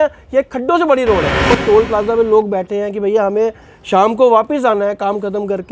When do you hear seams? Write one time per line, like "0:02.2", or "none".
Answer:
0:01.6